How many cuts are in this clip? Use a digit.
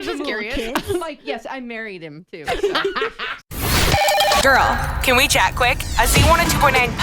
1